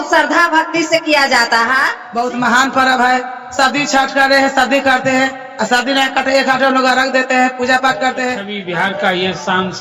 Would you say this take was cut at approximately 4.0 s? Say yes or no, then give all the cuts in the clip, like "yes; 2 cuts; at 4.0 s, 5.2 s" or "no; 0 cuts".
no; 2 cuts; at 2.0 s, 8.5 s